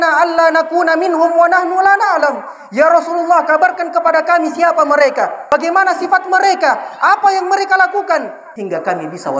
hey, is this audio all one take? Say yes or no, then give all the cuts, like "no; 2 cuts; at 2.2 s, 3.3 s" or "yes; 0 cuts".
no; 2 cuts; at 5.4 s, 8.4 s